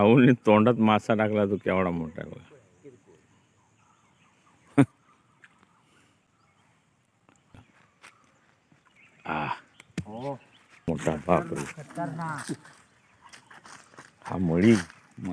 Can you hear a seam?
yes; 2 cuts; at 7.5 s, 10.9 s

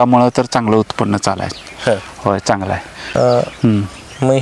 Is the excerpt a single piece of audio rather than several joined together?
yes; 0 cuts

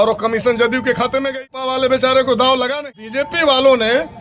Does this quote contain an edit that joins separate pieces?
yes; 2 cuts; at 1.5 s, 2.9 s

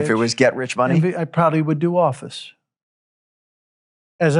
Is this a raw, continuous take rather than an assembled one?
yes; 0 cuts

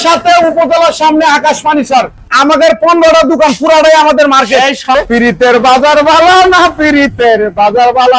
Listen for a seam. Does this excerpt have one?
yes; 2 cuts; at 2.3 s, 4.8 s

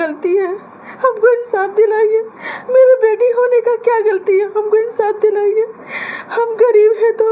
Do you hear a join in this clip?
no; 0 cuts

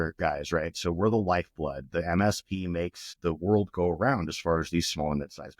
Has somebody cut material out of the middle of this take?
yes; 1 cut; at 3.1 s

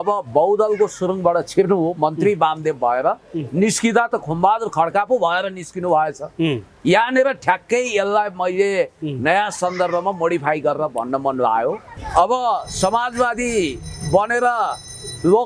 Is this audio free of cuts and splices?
no; 1 cut; at 11.8 s

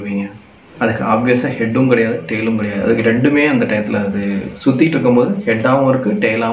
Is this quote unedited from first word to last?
yes; 0 cuts

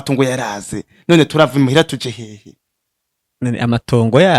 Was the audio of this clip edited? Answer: no; 0 cuts

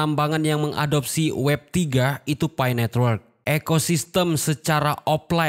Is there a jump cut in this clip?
yes; 1 cut; at 3.3 s

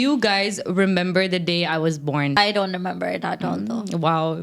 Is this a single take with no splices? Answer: no; 1 cut; at 2.4 s

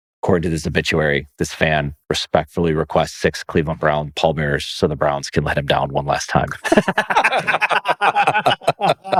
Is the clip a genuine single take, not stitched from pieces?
yes; 0 cuts

